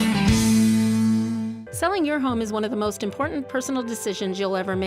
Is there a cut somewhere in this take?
yes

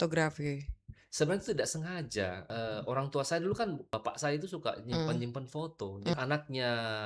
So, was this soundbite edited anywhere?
yes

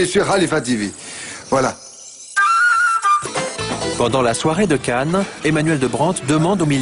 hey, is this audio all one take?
no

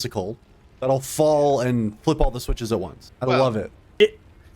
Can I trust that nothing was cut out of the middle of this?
no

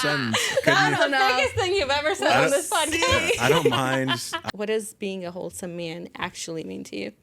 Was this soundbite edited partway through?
yes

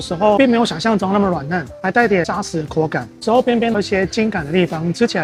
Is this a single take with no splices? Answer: yes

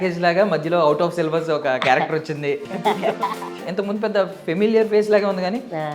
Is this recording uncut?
no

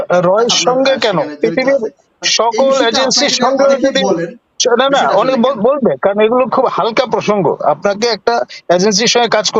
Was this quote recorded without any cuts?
yes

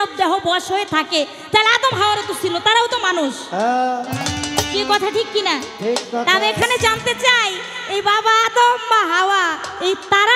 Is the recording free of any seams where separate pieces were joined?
yes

